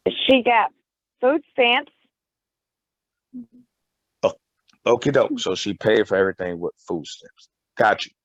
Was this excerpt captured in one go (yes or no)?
yes